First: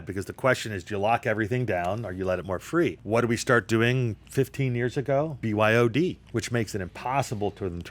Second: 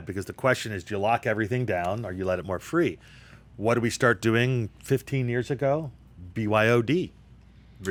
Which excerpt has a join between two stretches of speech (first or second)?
first